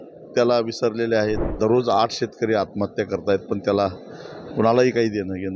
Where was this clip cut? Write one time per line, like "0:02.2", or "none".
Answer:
0:01.5